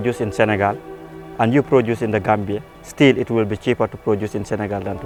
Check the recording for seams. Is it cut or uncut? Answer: uncut